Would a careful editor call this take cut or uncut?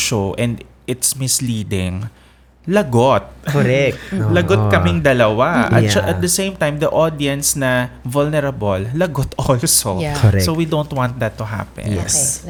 uncut